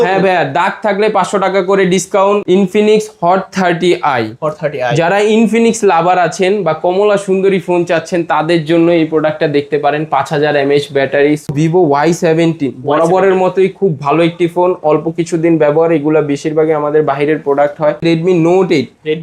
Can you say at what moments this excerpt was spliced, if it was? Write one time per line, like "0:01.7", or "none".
0:02.4
0:11.5
0:18.0